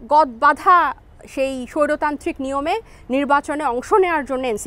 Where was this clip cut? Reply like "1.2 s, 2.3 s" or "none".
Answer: none